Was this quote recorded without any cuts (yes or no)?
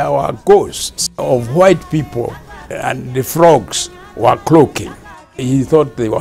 no